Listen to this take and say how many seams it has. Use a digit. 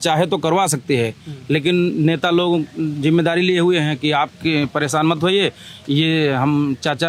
0